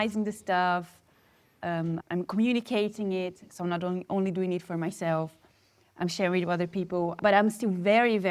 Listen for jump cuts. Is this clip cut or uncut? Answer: cut